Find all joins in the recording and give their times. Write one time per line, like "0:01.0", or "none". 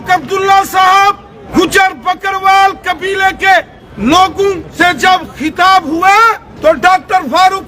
0:01.3
0:03.8
0:04.7
0:06.4